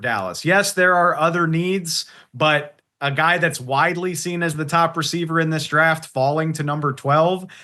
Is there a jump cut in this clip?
no; 0 cuts

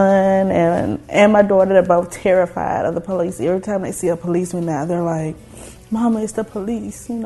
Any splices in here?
no; 0 cuts

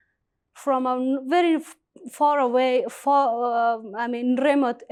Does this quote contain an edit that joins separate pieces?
no; 0 cuts

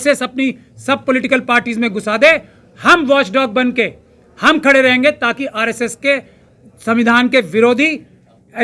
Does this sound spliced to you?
no; 0 cuts

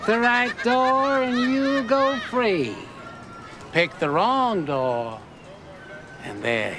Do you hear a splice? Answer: no; 0 cuts

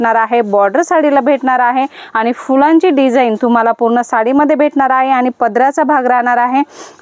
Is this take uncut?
yes; 0 cuts

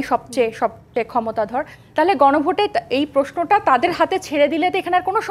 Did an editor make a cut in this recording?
no; 0 cuts

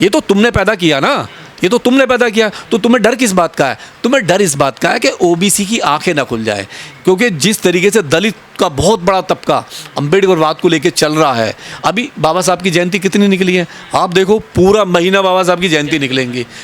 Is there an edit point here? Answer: no; 0 cuts

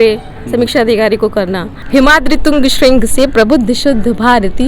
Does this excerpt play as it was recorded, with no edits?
no; 1 cut; at 1.7 s

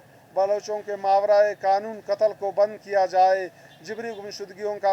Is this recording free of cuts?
yes; 0 cuts

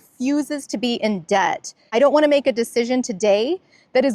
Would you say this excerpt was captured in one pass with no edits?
no; 1 cut; at 1.8 s

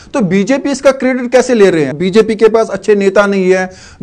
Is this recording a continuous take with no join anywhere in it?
no; 1 cut; at 1.9 s

